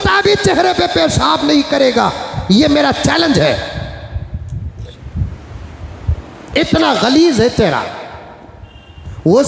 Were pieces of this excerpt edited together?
no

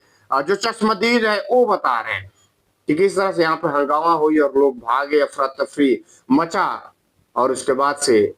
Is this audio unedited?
yes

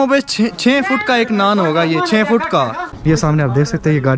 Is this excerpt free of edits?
no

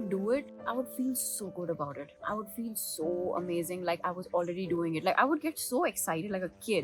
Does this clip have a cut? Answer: no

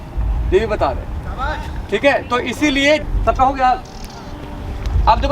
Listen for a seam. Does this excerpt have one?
yes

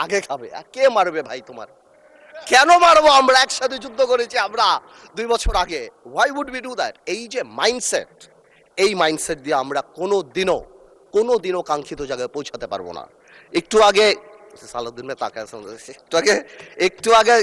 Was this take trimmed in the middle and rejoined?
no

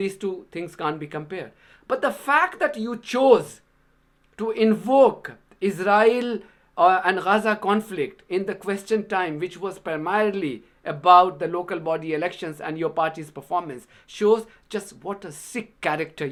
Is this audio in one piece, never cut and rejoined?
yes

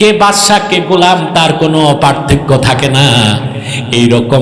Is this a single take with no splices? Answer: yes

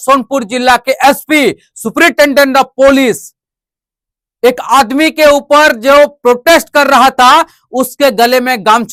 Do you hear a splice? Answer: no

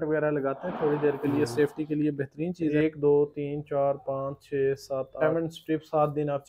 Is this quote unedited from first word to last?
no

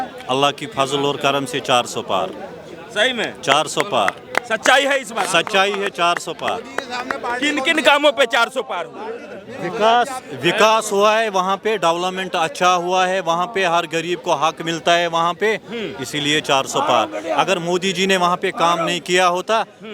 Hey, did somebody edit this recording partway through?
no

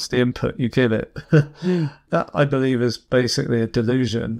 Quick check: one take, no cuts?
no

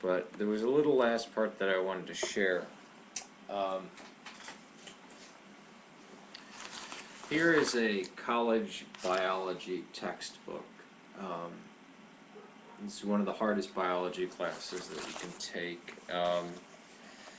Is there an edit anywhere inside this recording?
yes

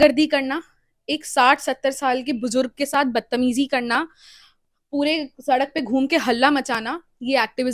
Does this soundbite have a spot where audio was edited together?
no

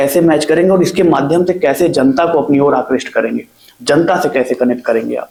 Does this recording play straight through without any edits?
yes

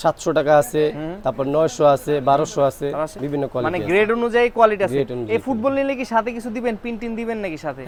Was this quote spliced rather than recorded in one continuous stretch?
no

